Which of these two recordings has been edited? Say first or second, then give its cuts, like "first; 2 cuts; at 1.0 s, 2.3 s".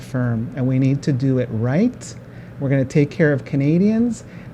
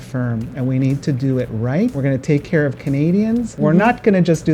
second; 2 cuts; at 2.0 s, 3.5 s